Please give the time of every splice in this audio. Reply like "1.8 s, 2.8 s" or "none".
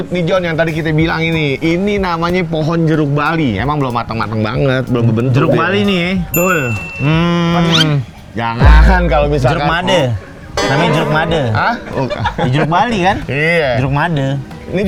none